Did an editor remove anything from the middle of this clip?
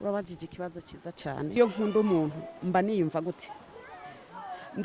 yes; 1 cut; at 1.6 s

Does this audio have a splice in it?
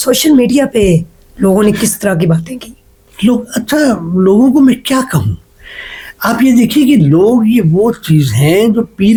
no; 0 cuts

